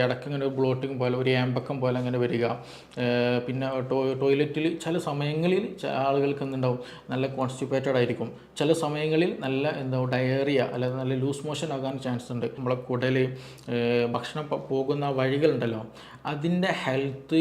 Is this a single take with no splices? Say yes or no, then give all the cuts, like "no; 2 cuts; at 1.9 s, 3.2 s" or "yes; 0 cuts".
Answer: no; 1 cut; at 12.6 s